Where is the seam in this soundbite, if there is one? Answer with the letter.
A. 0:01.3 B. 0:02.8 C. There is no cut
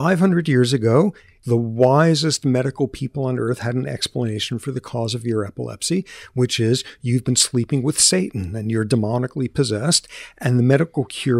A